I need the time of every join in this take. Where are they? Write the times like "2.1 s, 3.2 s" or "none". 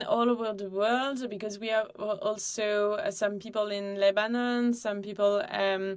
none

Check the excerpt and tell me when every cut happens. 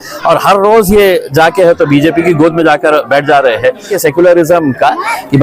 3.9 s

